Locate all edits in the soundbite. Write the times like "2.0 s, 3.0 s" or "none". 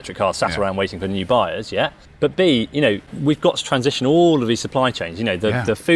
2.0 s, 3.1 s